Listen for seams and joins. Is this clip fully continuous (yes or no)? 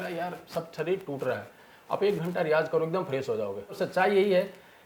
no